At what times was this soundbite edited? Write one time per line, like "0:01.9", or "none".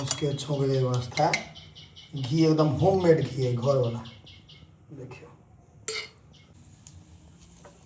0:06.6